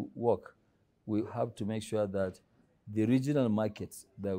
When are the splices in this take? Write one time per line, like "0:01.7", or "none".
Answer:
0:01.3